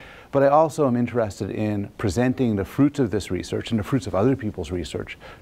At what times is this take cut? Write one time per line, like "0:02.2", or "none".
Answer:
0:02.9